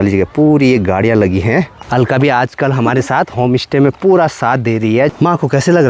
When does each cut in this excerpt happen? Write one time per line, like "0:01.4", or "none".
0:01.7
0:05.1